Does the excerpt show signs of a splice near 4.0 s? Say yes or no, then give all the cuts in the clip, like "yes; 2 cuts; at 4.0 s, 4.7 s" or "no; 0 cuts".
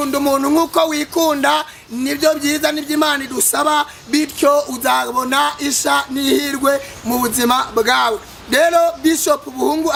no; 0 cuts